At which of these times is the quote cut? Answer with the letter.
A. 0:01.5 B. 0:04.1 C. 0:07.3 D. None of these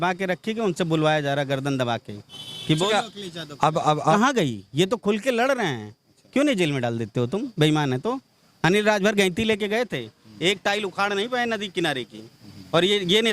B